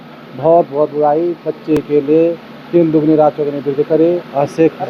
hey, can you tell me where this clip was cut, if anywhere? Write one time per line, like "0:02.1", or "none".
none